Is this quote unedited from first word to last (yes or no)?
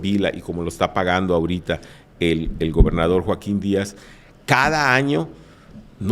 yes